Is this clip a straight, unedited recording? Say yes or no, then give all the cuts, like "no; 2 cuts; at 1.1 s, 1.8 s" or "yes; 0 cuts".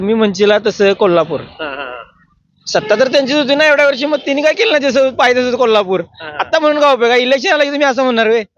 yes; 0 cuts